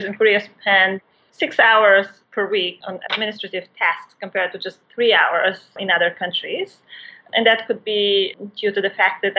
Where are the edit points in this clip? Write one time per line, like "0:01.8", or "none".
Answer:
0:02.8
0:05.8
0:07.2
0:08.3